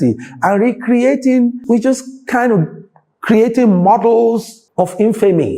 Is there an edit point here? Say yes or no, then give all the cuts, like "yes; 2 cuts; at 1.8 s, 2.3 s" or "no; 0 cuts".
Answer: yes; 2 cuts; at 1.6 s, 4.6 s